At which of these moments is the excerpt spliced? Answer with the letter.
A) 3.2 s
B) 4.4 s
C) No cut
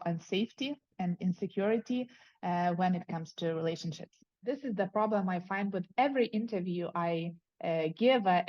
B